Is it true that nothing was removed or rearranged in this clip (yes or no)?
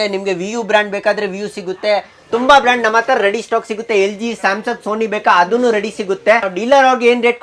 no